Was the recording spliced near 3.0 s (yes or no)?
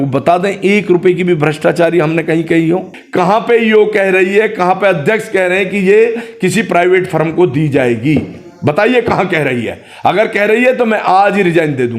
yes